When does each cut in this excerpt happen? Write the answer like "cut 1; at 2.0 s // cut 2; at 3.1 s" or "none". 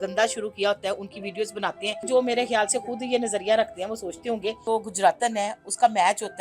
cut 1; at 2.0 s // cut 2; at 4.6 s